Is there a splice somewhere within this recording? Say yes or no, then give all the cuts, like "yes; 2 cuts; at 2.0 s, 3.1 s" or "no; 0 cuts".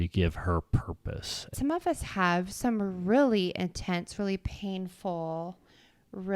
yes; 1 cut; at 1.5 s